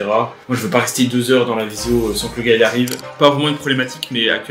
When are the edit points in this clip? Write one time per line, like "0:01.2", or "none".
0:03.0